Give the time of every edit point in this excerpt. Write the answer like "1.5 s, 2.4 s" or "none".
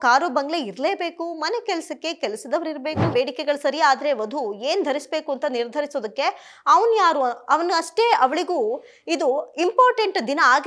3.1 s